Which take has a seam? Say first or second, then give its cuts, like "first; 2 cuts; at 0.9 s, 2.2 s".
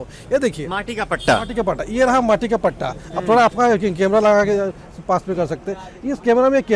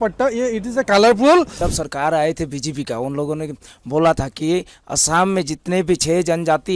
second; 1 cut; at 1.6 s